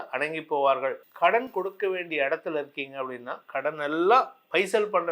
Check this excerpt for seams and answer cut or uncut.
cut